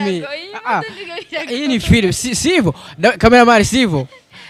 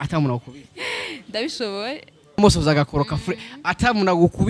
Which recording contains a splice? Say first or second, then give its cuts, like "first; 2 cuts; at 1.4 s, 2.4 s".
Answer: second; 1 cut; at 2.4 s